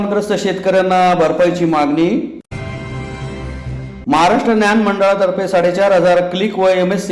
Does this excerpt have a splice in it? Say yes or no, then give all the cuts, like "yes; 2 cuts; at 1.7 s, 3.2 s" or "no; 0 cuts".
no; 0 cuts